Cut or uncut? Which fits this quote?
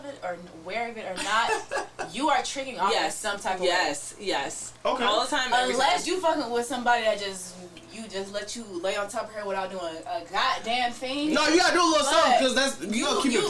uncut